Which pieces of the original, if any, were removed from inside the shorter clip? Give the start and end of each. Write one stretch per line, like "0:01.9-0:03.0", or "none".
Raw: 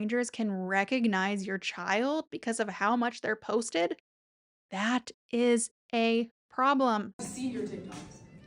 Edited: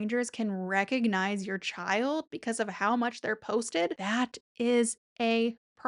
0:04.0-0:04.7